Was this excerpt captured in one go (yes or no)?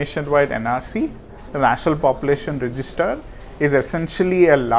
yes